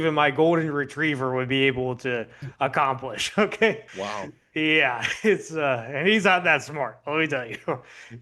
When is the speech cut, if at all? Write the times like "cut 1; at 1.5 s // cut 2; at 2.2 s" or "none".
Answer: cut 1; at 3.9 s